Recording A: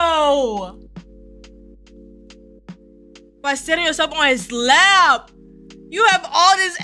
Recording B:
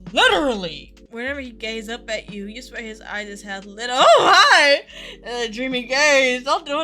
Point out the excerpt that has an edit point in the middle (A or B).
B